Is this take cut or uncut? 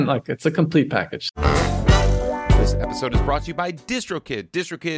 cut